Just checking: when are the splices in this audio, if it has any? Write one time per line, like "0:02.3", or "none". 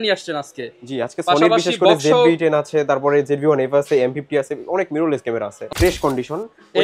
0:05.7